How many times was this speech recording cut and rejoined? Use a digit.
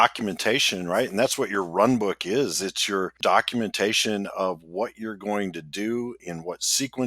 1